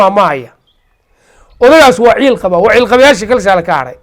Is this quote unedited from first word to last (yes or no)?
yes